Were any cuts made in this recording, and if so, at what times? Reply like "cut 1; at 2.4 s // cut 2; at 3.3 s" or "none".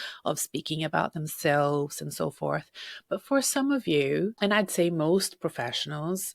cut 1; at 4.3 s